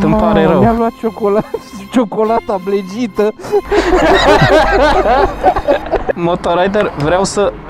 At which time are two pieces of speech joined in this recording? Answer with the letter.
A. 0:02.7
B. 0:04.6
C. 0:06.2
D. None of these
C